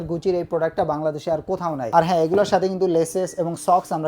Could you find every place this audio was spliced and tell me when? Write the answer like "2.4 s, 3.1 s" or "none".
1.8 s

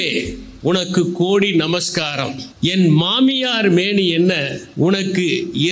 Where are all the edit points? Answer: 2.4 s, 4.6 s

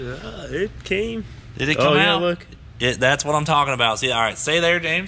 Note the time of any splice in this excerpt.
none

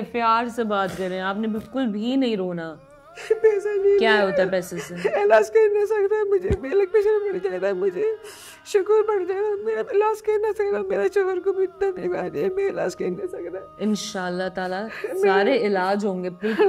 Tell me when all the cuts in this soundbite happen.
none

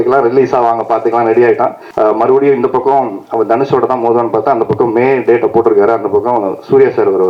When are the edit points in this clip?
1.8 s

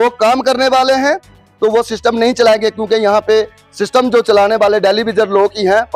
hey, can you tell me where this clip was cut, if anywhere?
none

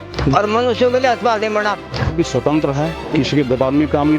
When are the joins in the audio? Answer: 2.1 s

